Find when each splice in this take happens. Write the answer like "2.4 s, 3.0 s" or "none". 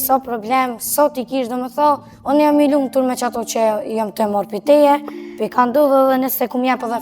5.4 s